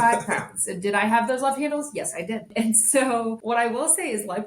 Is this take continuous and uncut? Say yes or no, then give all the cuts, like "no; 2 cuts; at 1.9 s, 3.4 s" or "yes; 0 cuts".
no; 2 cuts; at 2.5 s, 3.4 s